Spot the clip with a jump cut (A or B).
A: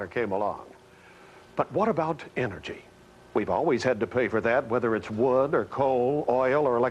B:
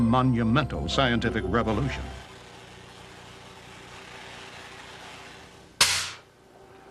B